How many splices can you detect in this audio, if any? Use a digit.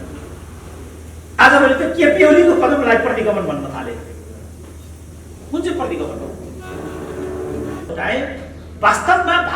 1